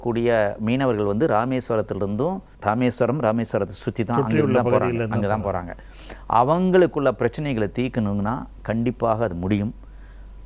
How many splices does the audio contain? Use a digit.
1